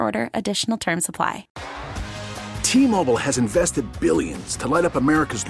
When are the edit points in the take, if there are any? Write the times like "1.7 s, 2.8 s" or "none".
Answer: 1.5 s